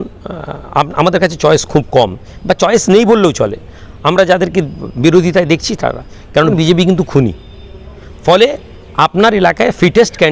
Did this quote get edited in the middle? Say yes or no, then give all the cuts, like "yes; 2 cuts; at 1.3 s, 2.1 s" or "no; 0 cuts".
yes; 1 cut; at 6.5 s